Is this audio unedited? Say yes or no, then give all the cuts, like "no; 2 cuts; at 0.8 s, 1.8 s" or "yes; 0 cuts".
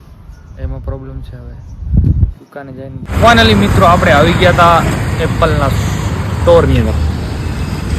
no; 1 cut; at 3.0 s